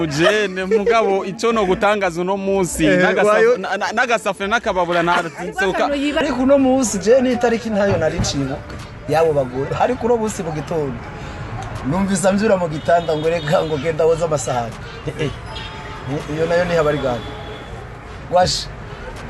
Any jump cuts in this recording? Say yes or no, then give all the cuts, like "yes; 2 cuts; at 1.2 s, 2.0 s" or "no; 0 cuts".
yes; 1 cut; at 6.2 s